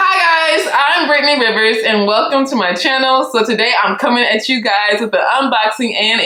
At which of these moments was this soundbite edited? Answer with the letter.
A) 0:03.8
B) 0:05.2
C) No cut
C